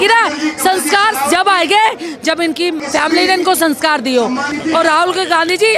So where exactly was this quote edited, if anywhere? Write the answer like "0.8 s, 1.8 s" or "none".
2.8 s, 4.5 s